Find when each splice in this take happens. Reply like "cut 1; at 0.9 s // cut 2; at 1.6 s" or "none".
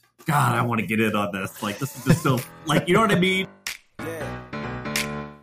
cut 1; at 3.6 s